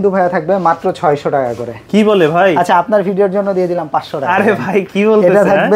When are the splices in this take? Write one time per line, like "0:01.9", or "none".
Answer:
none